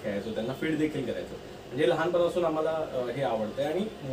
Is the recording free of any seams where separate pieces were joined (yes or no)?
yes